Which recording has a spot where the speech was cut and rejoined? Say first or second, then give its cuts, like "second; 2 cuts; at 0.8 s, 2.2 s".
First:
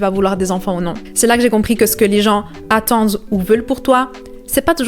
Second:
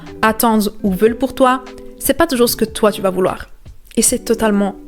first; 1 cut; at 1.0 s